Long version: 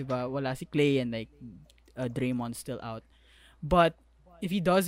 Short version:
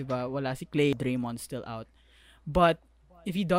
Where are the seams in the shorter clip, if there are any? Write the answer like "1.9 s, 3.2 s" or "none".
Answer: 0.9 s